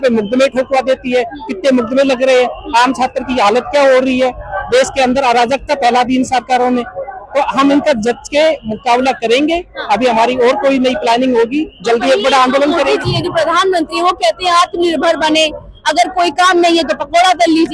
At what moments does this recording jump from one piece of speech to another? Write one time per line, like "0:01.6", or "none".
none